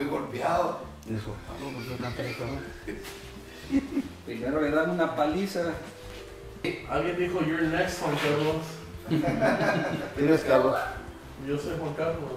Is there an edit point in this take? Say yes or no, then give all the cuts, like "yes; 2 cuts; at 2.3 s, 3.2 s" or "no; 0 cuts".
no; 0 cuts